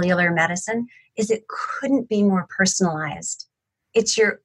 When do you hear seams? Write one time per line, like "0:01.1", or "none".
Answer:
none